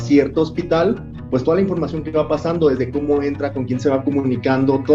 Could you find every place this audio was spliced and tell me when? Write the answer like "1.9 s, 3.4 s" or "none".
none